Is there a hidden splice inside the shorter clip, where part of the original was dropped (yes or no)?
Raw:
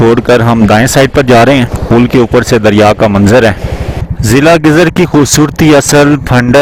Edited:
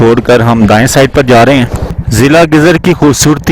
yes